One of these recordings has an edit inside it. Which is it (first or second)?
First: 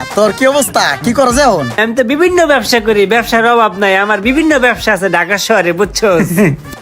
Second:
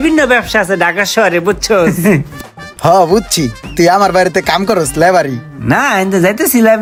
first